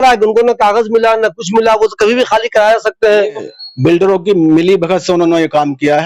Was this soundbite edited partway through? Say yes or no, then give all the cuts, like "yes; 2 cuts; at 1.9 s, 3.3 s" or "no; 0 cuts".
no; 0 cuts